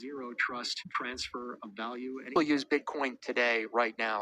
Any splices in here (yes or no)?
yes